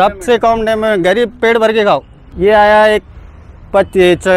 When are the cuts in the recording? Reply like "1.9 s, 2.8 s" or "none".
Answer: 2.2 s